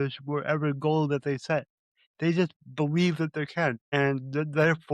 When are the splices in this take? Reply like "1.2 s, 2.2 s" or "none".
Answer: 3.8 s